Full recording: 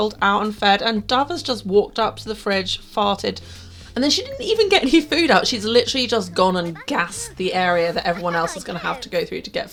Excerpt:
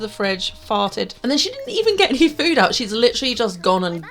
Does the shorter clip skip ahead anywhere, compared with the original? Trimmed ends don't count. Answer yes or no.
yes